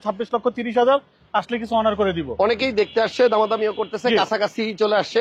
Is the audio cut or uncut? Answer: uncut